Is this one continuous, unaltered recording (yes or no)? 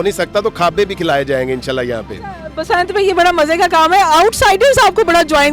yes